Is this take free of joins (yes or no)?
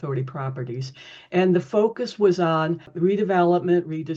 yes